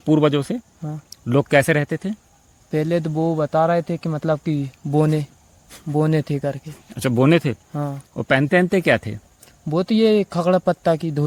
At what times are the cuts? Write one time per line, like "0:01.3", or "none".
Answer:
none